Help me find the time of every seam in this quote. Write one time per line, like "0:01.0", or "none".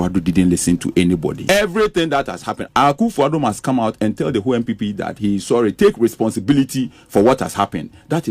0:01.4
0:02.5